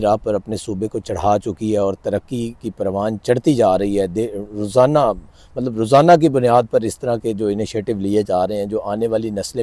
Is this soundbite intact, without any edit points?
yes; 0 cuts

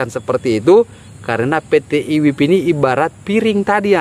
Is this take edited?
no; 0 cuts

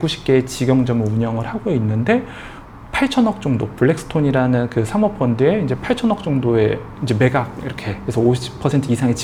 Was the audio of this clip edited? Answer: no; 0 cuts

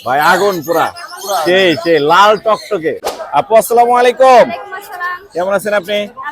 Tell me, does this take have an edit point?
yes; 1 cut; at 3.0 s

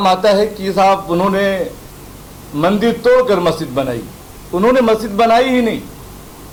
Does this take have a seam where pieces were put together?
no; 0 cuts

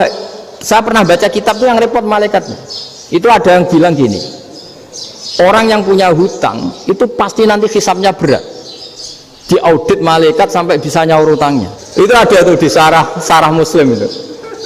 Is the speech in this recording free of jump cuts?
no; 1 cut; at 11.8 s

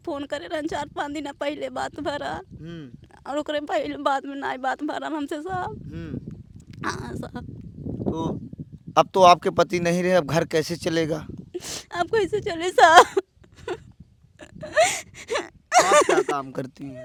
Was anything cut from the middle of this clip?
no; 0 cuts

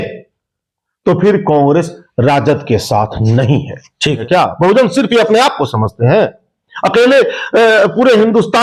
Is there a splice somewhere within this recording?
yes; 1 cut; at 4.2 s

